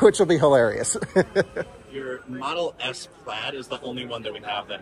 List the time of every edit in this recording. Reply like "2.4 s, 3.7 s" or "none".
1.6 s